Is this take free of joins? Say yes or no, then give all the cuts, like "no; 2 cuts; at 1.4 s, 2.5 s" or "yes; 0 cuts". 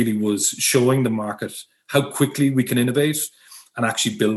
yes; 0 cuts